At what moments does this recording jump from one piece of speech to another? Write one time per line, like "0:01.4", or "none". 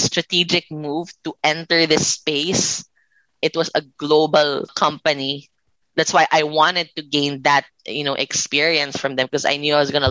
0:03.3
0:04.7

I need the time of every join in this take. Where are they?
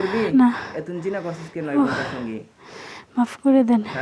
none

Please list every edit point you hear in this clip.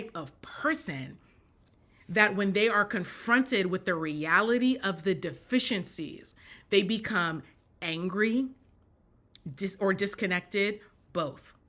none

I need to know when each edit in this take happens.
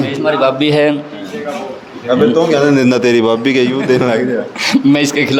none

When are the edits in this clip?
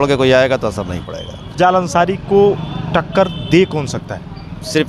0:01.5

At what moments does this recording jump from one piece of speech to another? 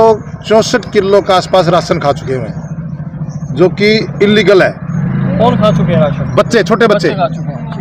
none

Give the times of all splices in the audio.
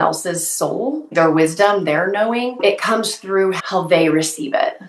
0:01.1
0:02.6
0:03.6

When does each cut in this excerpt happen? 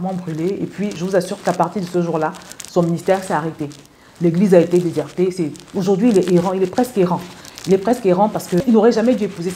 0:08.6

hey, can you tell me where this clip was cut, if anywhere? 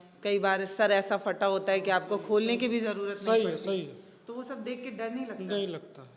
none

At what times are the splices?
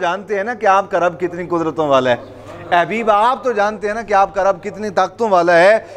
none

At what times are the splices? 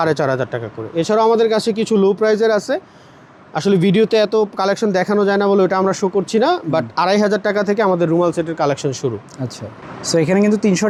none

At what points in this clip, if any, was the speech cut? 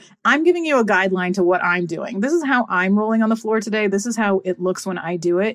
none

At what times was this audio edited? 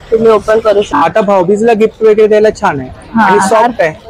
0:01.0

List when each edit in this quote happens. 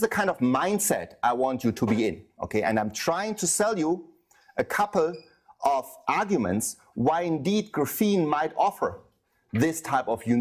none

